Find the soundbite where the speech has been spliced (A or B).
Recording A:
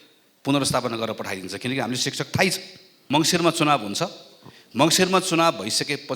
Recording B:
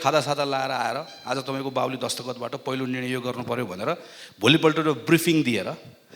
A